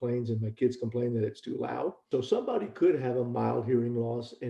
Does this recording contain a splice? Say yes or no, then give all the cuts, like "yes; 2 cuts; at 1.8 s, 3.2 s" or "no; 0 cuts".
yes; 1 cut; at 2.0 s